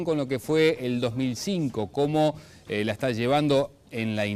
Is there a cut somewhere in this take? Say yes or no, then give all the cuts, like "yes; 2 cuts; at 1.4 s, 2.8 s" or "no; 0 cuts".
no; 0 cuts